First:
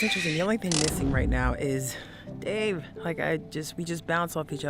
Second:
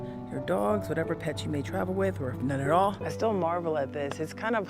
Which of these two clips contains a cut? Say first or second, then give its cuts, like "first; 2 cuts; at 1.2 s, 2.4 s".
second; 1 cut; at 3.1 s